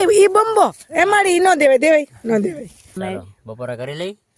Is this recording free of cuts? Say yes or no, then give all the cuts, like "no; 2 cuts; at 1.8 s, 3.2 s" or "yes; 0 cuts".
no; 1 cut; at 3.0 s